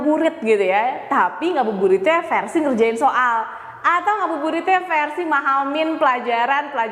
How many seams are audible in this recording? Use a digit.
0